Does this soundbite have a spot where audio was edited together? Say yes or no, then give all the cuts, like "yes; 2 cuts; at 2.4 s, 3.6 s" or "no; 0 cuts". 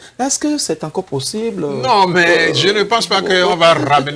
no; 0 cuts